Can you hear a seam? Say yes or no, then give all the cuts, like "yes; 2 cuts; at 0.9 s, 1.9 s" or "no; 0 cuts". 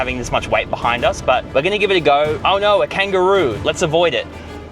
yes; 2 cuts; at 1.5 s, 2.4 s